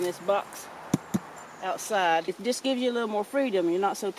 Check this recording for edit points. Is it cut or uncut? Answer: cut